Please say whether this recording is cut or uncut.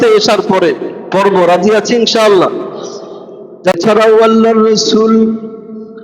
cut